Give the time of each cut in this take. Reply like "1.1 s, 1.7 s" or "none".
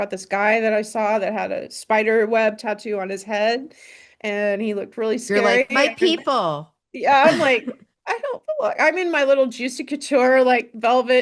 none